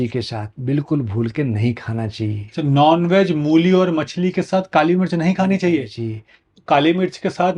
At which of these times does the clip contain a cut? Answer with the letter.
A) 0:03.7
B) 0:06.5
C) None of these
B